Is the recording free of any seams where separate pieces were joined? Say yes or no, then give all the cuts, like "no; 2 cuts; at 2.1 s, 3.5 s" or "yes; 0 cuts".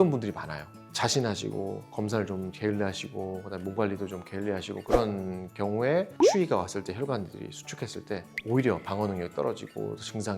yes; 0 cuts